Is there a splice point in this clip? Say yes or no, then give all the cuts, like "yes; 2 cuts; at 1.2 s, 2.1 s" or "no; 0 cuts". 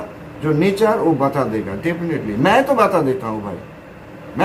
no; 0 cuts